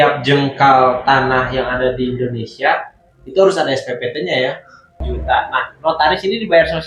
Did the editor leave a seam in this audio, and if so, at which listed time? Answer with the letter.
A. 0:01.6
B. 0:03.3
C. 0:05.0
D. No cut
C